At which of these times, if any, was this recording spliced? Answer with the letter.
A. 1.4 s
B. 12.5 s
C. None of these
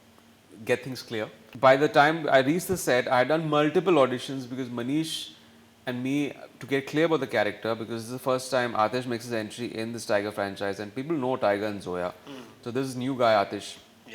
A